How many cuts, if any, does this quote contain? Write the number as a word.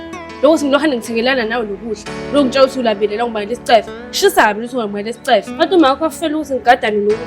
one